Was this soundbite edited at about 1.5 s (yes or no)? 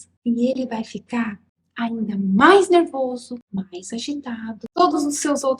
no